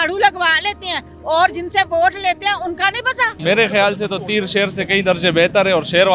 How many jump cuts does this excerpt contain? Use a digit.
1